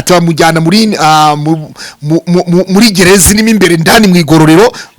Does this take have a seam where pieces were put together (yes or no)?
no